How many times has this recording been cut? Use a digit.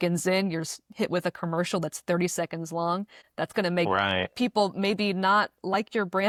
0